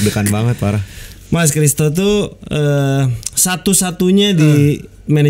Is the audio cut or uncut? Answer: uncut